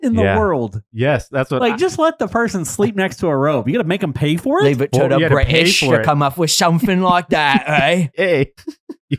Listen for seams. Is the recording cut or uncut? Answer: uncut